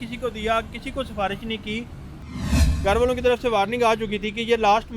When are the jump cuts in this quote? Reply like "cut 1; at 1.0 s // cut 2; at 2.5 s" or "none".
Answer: cut 1; at 2.6 s